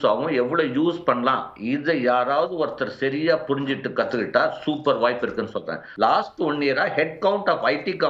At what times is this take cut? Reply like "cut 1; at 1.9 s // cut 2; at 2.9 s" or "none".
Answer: cut 1; at 5.8 s